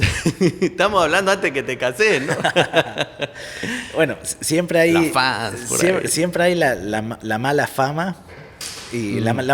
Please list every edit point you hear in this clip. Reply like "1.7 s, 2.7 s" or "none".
none